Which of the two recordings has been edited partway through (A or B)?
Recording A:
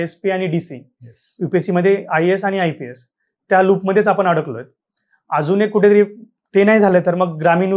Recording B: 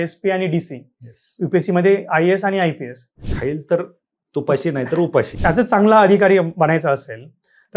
B